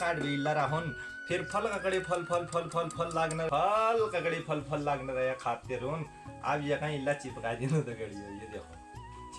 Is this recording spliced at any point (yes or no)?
yes